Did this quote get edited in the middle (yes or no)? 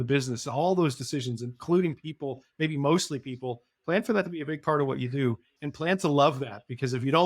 yes